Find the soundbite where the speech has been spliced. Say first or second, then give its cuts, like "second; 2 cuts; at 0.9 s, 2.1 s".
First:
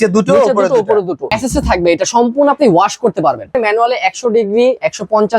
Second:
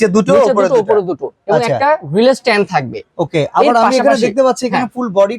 first; 2 cuts; at 1.3 s, 3.5 s